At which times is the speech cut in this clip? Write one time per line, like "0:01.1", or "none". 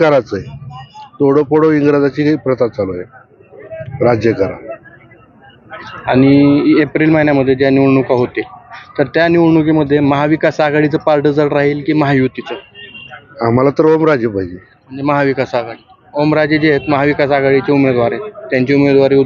none